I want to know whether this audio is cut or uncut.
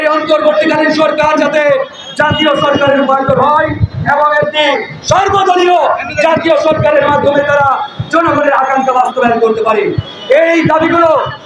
uncut